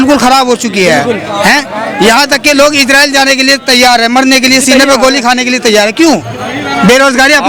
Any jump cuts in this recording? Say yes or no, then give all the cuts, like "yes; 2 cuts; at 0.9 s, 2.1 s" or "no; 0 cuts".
no; 0 cuts